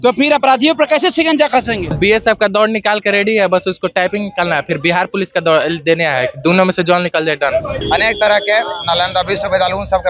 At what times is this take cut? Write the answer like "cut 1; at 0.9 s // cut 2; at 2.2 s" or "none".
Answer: cut 1; at 2.0 s // cut 2; at 7.8 s